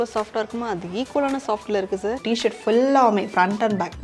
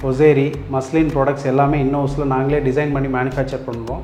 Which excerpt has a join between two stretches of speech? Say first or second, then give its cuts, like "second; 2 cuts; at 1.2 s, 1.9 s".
first; 1 cut; at 2.2 s